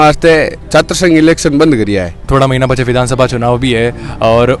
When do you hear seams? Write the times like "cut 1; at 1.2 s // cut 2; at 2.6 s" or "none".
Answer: cut 1; at 2.3 s